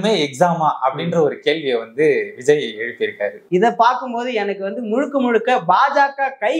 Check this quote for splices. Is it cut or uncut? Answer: cut